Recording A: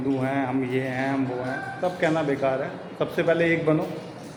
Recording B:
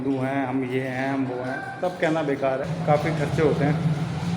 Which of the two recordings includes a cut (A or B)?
B